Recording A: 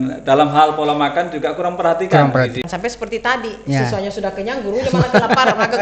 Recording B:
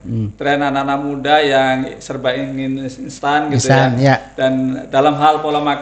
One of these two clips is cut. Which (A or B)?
A